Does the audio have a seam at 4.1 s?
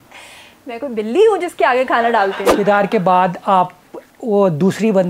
no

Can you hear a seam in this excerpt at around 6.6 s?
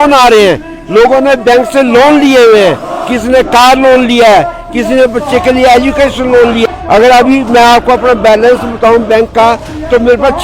yes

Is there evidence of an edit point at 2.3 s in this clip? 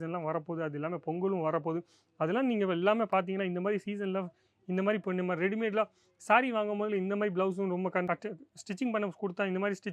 no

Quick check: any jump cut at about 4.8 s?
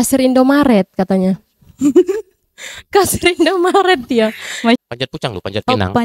yes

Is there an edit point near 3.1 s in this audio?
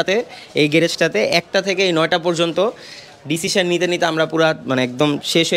no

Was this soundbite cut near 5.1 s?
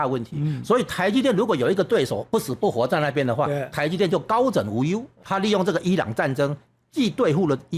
yes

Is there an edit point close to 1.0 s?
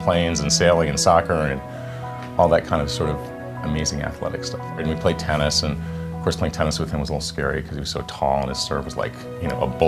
yes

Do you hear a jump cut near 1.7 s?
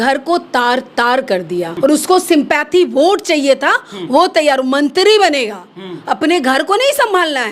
yes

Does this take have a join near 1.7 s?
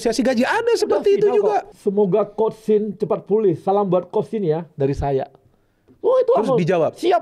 yes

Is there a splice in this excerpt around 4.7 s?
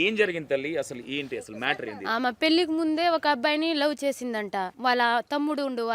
yes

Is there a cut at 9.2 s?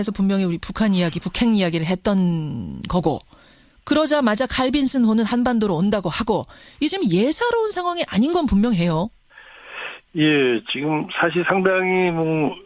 yes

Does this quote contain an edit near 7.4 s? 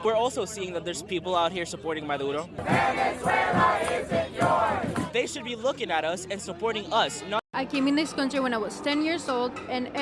yes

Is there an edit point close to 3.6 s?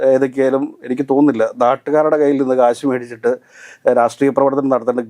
no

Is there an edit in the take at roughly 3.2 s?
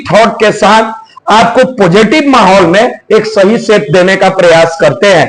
no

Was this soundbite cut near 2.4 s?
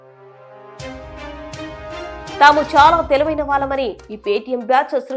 yes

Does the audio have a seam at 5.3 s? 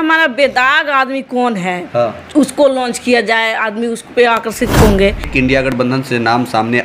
yes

